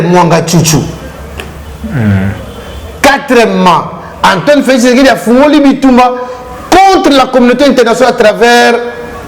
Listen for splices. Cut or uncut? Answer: uncut